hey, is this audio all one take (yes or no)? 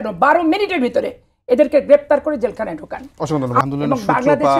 no